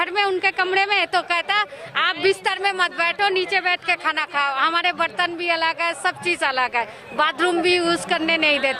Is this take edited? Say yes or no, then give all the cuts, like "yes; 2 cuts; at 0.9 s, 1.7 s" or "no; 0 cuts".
no; 0 cuts